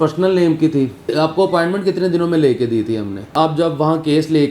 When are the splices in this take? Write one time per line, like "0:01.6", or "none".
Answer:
0:01.1
0:03.3